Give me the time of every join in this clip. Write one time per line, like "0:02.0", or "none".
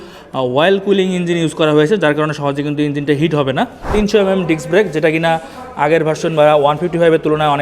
0:03.9